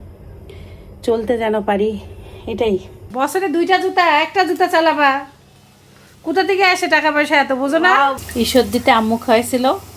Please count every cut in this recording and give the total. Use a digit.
2